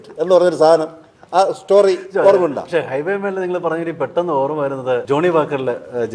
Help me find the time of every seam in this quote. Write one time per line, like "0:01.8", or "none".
0:05.0